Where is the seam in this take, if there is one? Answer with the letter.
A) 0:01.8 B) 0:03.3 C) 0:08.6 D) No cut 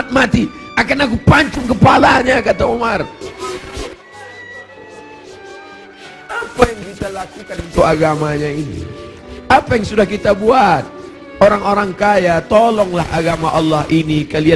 B